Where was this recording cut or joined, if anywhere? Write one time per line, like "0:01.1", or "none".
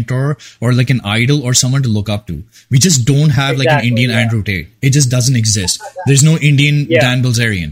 none